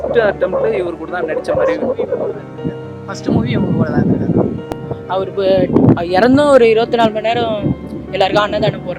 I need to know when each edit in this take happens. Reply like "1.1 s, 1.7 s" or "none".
4.7 s